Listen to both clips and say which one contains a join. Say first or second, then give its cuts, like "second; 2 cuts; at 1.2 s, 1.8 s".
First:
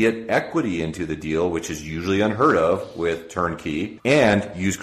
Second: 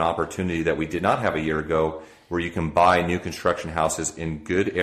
first; 1 cut; at 3.9 s